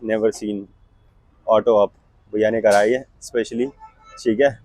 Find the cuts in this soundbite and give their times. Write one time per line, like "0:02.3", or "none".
none